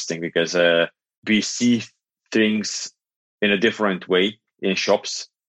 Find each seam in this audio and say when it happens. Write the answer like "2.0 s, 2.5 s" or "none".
1.2 s